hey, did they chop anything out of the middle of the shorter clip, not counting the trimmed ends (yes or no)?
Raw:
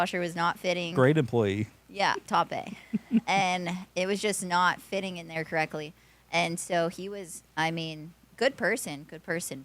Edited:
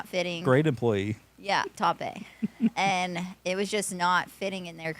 no